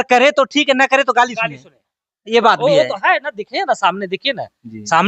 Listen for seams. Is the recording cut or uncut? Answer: uncut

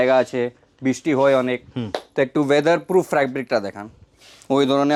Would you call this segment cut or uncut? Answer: uncut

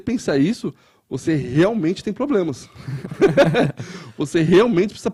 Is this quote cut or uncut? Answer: uncut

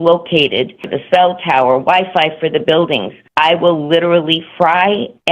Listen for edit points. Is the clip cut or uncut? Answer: cut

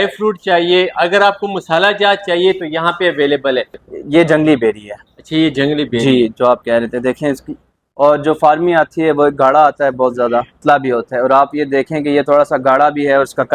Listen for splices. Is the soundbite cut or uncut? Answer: cut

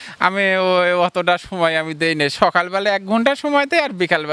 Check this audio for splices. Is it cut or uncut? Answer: uncut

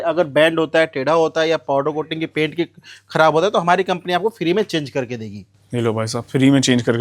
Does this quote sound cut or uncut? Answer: uncut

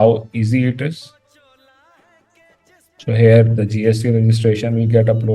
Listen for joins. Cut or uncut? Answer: cut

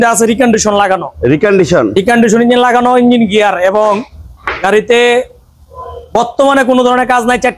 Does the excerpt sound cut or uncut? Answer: uncut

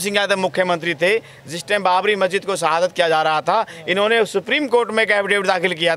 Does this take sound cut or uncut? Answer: uncut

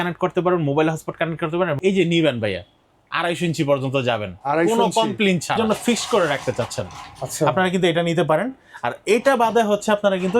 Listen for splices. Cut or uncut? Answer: cut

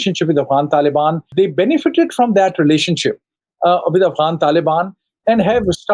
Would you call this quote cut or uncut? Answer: cut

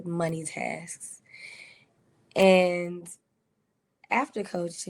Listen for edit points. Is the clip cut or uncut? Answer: uncut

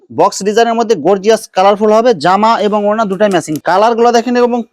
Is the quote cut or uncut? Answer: cut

